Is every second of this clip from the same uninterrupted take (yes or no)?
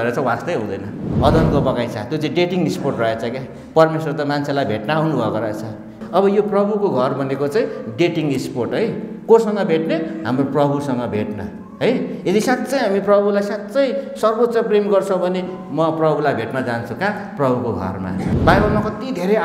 no